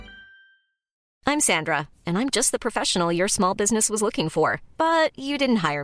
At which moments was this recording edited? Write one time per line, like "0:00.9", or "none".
0:01.0